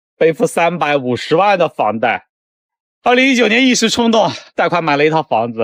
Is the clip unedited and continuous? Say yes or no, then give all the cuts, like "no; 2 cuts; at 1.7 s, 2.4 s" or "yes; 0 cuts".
yes; 0 cuts